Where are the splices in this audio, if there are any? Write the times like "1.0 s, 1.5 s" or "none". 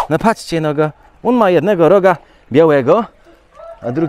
none